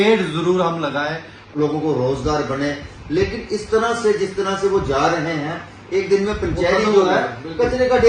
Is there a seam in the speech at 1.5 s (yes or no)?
yes